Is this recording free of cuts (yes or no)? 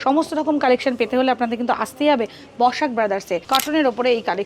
no